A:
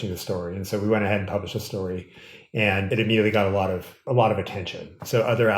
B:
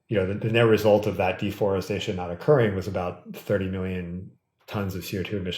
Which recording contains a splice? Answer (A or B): A